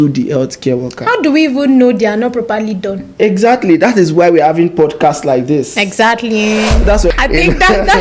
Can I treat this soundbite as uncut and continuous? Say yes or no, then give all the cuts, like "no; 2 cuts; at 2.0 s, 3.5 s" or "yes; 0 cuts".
no; 1 cut; at 7.1 s